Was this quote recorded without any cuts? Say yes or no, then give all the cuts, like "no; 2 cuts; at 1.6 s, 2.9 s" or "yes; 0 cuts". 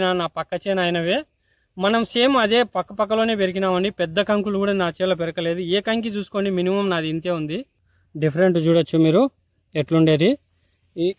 yes; 0 cuts